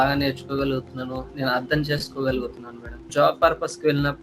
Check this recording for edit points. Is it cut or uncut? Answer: cut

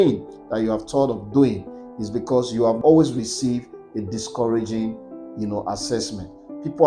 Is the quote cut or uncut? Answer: cut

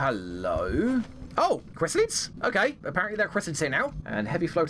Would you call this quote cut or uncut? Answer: cut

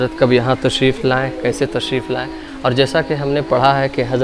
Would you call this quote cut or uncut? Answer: uncut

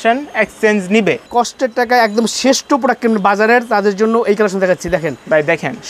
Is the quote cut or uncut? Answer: cut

